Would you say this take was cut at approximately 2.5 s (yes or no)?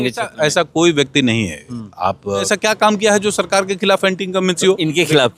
yes